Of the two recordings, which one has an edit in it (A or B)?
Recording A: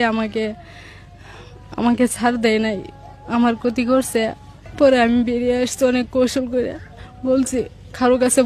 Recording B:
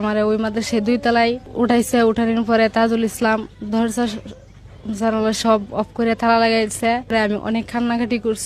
B